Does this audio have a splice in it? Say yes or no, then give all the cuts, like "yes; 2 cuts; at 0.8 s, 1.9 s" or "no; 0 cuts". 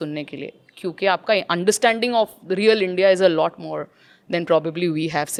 no; 0 cuts